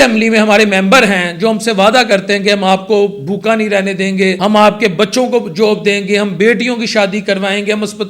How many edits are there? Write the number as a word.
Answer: one